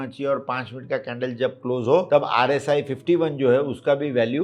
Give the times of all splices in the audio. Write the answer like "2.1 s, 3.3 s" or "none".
2.1 s

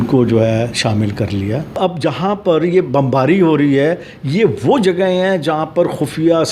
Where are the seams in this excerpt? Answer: 1.7 s

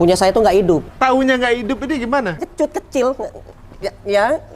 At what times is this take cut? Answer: 0.9 s, 2.4 s

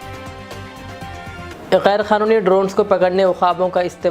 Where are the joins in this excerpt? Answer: 1.5 s

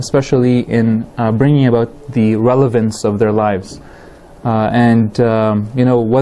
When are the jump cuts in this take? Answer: none

